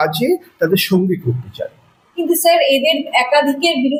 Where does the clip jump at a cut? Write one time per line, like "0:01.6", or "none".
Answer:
none